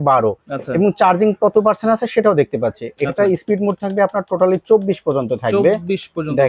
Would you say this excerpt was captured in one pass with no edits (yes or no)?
yes